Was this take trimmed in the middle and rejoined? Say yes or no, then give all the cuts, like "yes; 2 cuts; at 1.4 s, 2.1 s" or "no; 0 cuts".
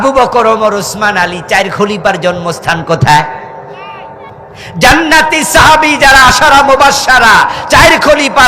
yes; 1 cut; at 4.6 s